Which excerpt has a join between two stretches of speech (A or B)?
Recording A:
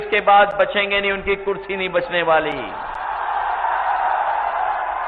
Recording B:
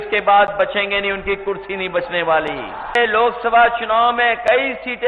B